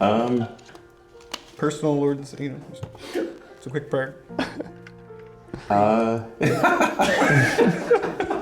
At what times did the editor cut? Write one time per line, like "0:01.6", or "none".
0:06.9